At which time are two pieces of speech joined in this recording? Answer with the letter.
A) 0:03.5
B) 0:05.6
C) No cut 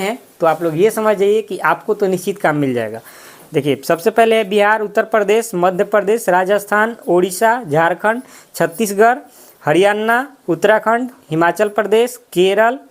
C